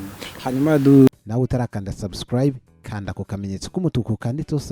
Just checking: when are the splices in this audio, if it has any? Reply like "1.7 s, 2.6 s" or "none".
1.1 s

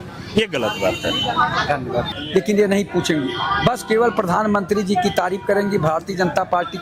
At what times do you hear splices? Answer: 2.1 s

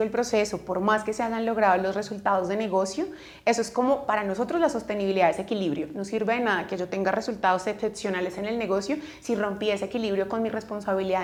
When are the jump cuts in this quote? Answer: none

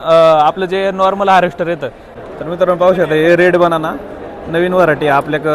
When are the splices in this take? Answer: 2.1 s

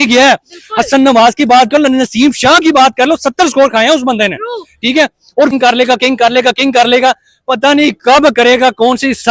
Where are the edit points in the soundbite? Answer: 5.5 s

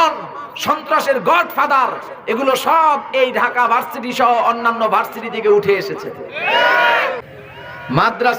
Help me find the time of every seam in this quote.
7.3 s

